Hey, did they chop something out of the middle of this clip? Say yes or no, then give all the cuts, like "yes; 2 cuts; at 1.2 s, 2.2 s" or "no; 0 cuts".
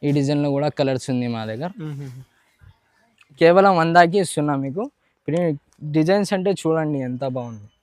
yes; 1 cut; at 3.4 s